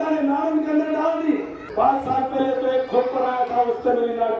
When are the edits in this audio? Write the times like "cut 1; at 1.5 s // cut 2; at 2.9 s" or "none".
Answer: cut 1; at 1.6 s